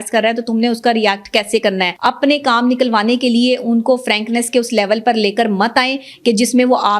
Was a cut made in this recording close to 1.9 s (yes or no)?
yes